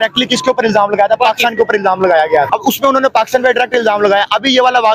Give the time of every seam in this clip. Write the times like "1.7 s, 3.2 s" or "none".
2.5 s